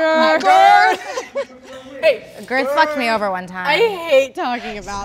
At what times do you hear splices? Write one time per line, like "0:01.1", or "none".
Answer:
none